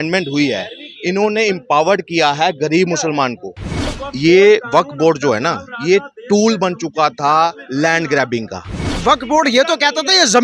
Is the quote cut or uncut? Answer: cut